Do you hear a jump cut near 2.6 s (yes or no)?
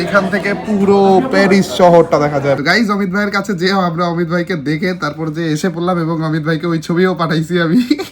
yes